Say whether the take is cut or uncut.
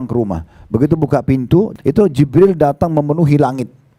cut